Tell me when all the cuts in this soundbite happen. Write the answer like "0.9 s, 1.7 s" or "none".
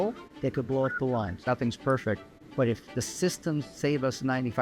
1.4 s

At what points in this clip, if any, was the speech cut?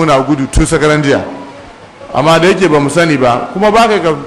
none

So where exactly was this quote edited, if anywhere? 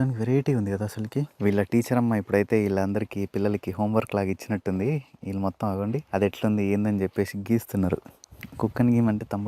1.3 s, 6.1 s

